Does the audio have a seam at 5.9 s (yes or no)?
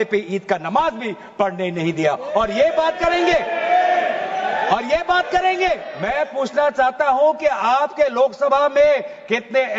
yes